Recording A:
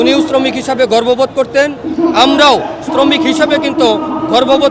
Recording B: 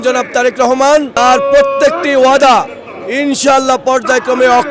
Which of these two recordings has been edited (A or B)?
B